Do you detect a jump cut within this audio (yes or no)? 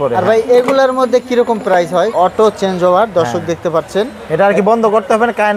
yes